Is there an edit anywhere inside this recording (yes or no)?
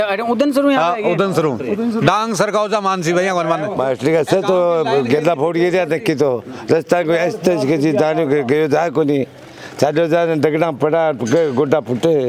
yes